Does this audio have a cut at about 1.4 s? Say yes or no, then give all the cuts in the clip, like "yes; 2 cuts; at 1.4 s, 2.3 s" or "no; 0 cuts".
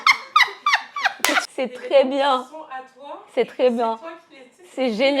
yes; 1 cut; at 1.4 s